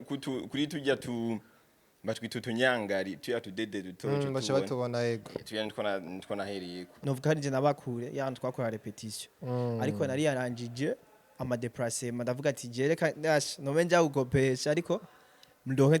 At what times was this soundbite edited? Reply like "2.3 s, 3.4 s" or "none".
6.9 s